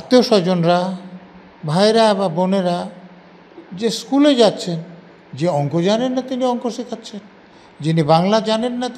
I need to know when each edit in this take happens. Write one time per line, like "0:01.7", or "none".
none